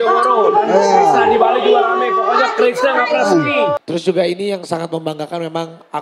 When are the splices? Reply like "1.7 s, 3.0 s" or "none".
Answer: 3.8 s